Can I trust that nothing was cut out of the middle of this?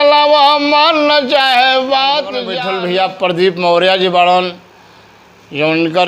no; 1 cut; at 2.5 s

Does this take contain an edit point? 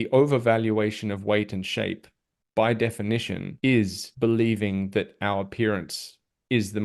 yes; 2 cuts; at 3.5 s, 4.0 s

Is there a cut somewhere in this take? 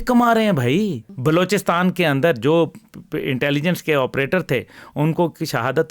yes; 1 cut; at 1.0 s

